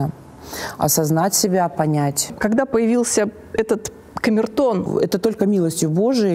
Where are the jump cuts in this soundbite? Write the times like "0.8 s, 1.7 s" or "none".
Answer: 2.3 s, 4.9 s